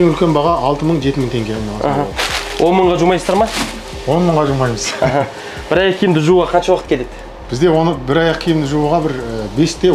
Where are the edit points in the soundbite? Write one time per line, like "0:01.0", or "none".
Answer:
none